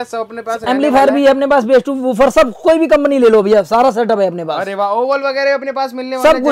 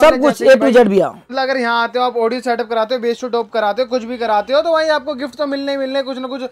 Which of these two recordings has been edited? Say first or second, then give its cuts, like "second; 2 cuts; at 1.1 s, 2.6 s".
second; 1 cut; at 1.3 s